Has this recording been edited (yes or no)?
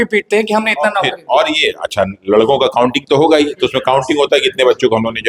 no